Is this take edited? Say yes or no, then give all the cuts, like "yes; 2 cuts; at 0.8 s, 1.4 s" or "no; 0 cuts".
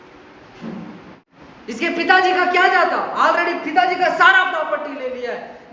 yes; 1 cut; at 1.3 s